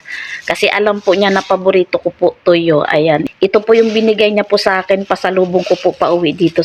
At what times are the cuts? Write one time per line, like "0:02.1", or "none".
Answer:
0:03.3